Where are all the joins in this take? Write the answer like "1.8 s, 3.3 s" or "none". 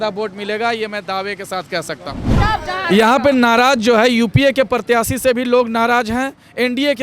2.4 s